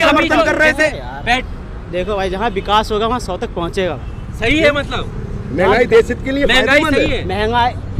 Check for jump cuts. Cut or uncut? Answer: cut